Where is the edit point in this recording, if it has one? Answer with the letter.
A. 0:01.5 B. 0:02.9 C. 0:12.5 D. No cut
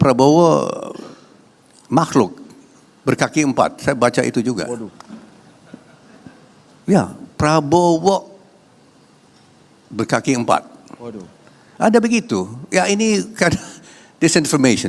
D